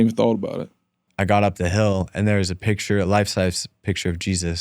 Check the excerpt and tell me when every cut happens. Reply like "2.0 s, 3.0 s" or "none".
1.1 s